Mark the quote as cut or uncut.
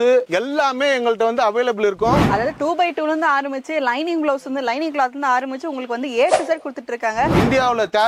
cut